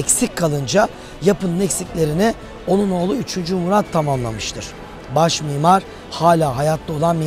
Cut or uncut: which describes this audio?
uncut